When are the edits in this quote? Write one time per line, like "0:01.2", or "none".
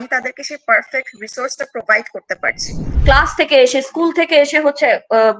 0:02.9